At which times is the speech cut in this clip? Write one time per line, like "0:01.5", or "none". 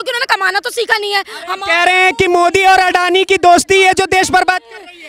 none

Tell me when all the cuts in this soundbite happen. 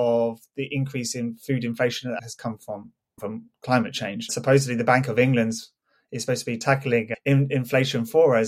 0:02.2
0:04.4
0:06.6

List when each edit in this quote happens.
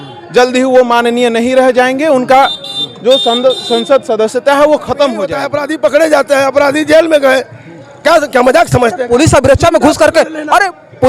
0:05.5

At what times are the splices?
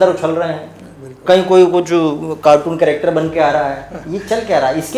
none

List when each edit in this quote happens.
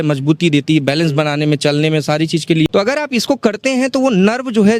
0:02.6

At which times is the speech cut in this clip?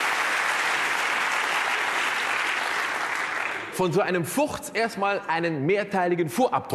0:01.1

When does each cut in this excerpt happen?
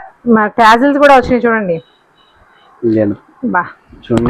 none

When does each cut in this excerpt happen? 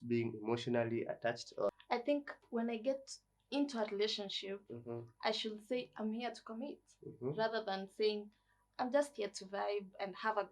0:01.7

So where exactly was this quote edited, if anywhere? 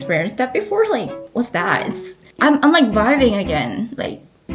0:02.3

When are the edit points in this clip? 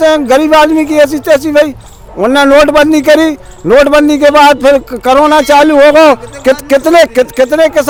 none

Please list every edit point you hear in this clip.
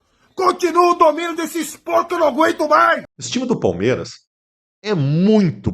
0:03.2

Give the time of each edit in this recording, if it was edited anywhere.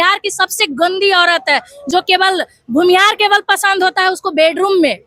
none

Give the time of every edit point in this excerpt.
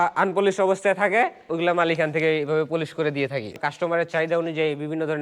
0:01.5
0:03.6

